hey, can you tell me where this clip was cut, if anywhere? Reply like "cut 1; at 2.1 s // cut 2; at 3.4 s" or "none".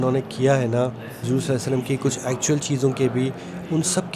cut 1; at 1.1 s

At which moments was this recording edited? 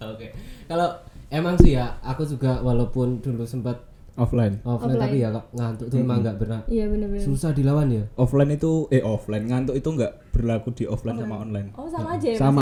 none

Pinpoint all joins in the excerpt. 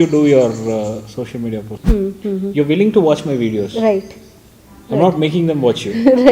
cut 1; at 1.7 s

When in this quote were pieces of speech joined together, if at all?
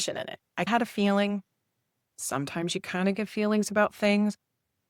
none

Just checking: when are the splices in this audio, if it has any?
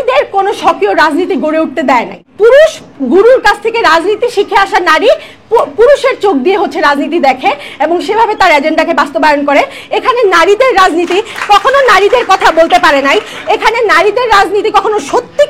cut 1; at 2.2 s

